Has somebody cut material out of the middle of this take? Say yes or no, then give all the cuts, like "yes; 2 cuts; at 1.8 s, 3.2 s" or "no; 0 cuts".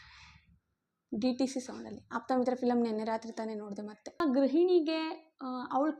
yes; 1 cut; at 4.2 s